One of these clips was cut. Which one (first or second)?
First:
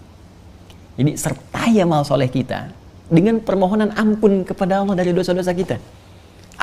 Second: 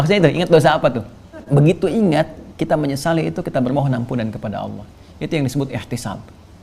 second